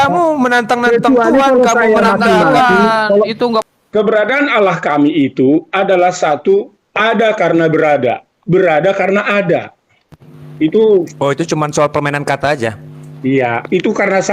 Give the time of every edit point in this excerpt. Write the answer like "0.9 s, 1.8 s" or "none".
3.6 s